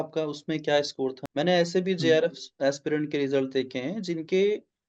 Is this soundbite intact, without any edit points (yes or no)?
no